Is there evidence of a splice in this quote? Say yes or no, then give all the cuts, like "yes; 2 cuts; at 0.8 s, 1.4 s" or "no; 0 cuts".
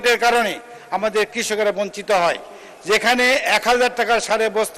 no; 0 cuts